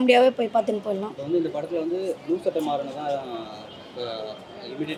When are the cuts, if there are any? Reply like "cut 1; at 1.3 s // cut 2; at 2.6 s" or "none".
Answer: none

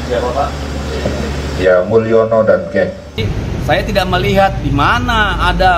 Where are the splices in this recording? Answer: cut 1; at 3.2 s

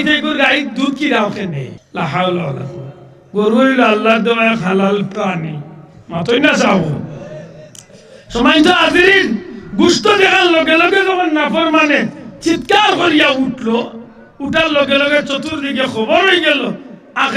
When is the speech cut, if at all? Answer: cut 1; at 1.8 s

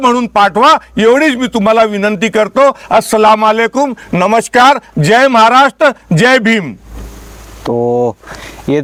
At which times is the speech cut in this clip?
none

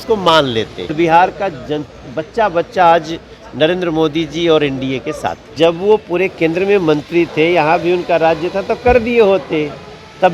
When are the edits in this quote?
cut 1; at 0.9 s // cut 2; at 5.5 s

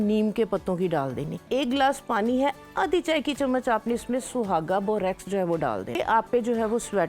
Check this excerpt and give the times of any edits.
cut 1; at 1.5 s // cut 2; at 6.0 s

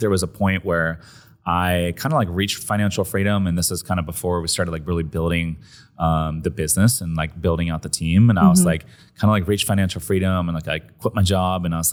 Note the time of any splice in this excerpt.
none

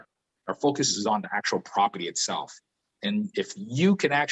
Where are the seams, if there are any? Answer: none

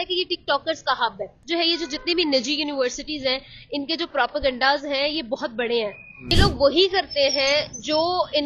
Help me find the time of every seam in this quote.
cut 1; at 1.3 s // cut 2; at 6.3 s

